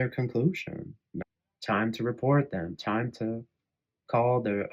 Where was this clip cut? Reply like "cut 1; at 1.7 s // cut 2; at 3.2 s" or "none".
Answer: cut 1; at 1.2 s